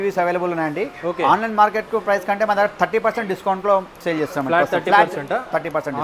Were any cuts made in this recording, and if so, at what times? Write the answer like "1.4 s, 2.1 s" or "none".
none

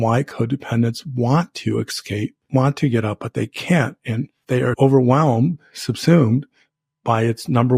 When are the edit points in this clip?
2.4 s, 4.6 s

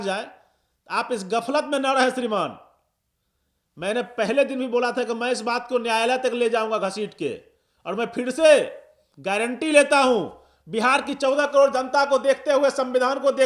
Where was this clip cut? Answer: none

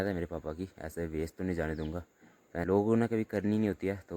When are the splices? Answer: 2.6 s

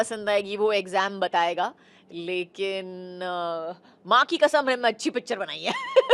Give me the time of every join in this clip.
none

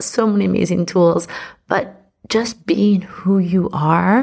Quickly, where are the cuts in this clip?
none

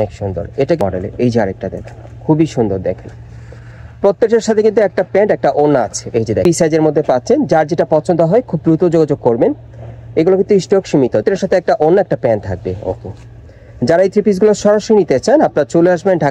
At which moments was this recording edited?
0.8 s, 6.5 s, 11.2 s

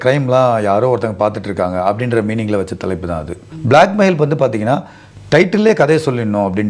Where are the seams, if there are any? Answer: 3.5 s

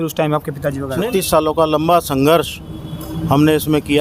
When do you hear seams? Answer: 0.9 s

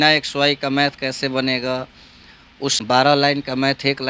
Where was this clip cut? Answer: 2.8 s

